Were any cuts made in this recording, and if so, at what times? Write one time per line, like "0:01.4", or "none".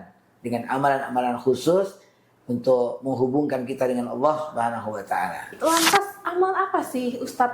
0:05.6